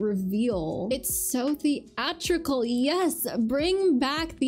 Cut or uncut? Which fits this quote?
uncut